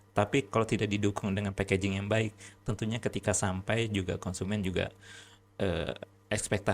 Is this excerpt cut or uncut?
uncut